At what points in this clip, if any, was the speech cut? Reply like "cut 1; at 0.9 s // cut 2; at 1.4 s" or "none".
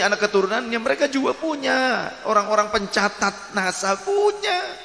none